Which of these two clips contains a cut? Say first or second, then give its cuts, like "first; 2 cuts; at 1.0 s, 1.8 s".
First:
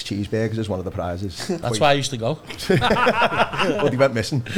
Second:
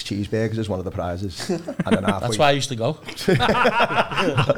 first; 2 cuts; at 1.6 s, 3.8 s